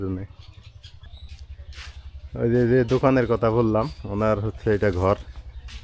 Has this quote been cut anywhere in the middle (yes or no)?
yes